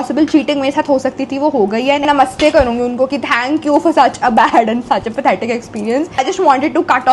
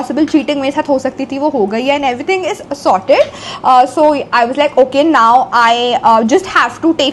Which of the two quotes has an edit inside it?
first; 2 cuts; at 2.0 s, 6.2 s

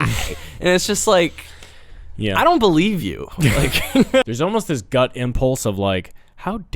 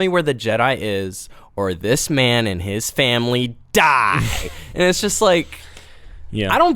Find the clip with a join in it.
first; 1 cut; at 4.2 s

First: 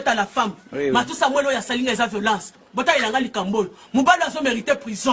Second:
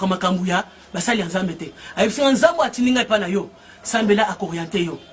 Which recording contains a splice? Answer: first; 1 cut; at 2.6 s

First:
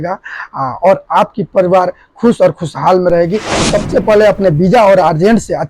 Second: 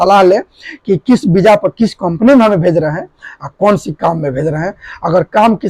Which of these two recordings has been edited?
first; 1 cut; at 3.5 s

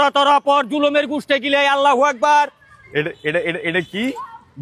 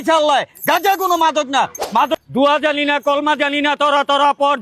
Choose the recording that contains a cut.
second; 1 cut; at 2.1 s

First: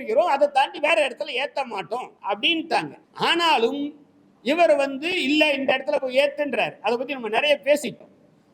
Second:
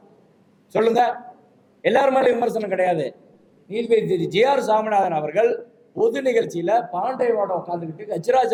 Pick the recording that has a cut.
first; 2 cuts; at 2.1 s, 3.0 s

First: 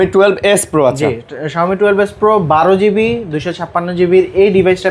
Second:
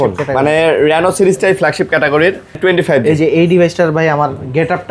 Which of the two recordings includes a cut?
second; 1 cut; at 2.6 s

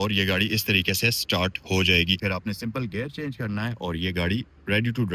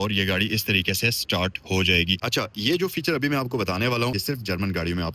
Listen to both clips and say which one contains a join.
second; 2 cuts; at 2.2 s, 4.2 s

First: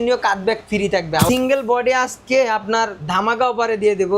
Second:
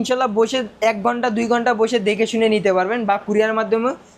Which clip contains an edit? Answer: first; 1 cut; at 1.3 s

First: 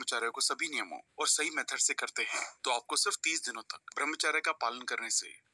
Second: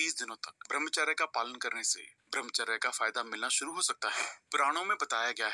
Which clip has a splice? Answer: second; 1 cut; at 4.3 s

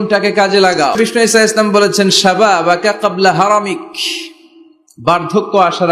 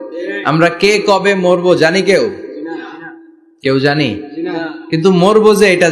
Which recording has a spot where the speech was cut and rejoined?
first; 1 cut; at 1.0 s

